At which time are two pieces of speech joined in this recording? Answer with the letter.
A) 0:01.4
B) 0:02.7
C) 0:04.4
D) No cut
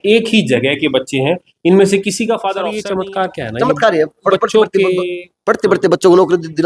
B